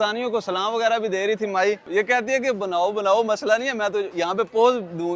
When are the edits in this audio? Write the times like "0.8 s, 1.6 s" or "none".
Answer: 1.8 s